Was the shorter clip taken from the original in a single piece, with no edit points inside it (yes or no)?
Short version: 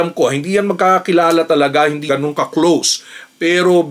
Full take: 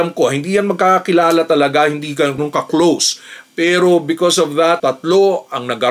no